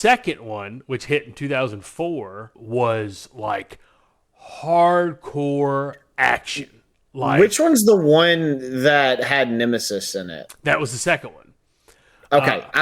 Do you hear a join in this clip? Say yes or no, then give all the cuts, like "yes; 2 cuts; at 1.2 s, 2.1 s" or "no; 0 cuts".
yes; 1 cut; at 2.5 s